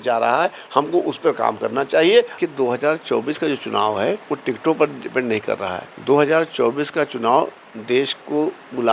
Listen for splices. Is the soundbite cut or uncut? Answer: cut